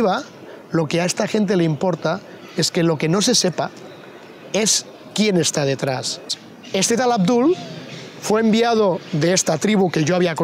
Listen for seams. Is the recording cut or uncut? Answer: cut